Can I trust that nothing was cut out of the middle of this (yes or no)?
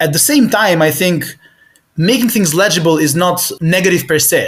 yes